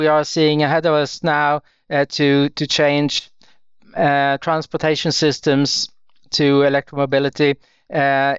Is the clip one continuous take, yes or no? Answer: yes